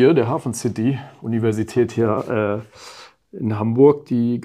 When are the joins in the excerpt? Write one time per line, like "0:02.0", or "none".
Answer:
none